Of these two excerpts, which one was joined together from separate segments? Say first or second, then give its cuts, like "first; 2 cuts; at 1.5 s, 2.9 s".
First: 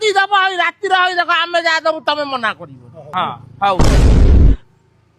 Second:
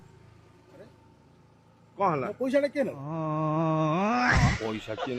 first; 1 cut; at 3.1 s